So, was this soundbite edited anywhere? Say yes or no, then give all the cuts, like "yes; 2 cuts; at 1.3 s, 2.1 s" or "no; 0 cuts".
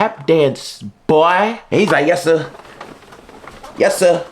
yes; 1 cut; at 1.6 s